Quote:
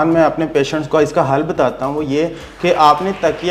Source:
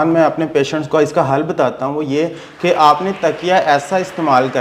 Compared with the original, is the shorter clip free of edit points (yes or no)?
yes